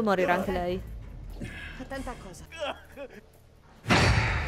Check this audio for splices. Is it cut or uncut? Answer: cut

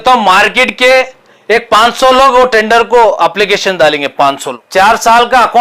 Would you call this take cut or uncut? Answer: cut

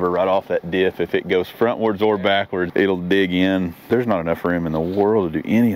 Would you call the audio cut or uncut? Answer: cut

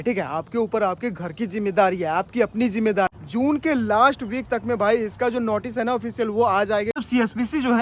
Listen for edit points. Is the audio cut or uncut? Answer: cut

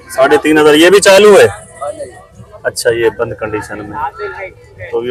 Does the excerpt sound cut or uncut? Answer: uncut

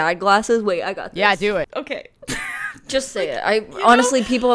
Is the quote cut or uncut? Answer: cut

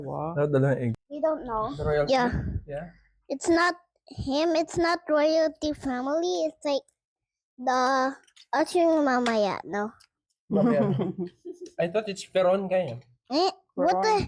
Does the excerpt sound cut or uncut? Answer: cut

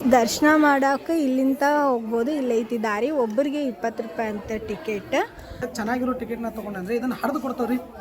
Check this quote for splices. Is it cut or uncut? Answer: cut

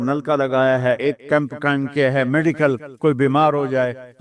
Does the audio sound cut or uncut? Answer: cut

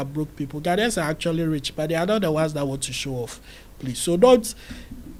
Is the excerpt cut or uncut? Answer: uncut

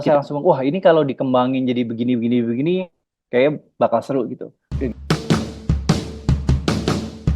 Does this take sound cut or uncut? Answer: cut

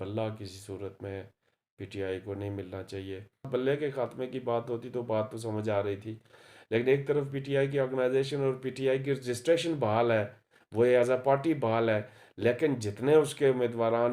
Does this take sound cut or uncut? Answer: cut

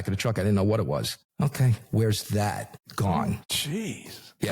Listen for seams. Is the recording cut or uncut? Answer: cut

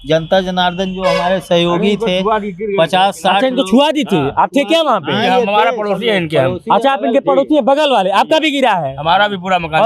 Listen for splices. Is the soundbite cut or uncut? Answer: uncut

